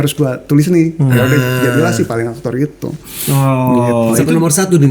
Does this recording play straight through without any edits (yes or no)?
yes